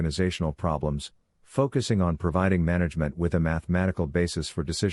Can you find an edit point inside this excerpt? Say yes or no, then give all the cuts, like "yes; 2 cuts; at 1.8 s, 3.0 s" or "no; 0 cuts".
no; 0 cuts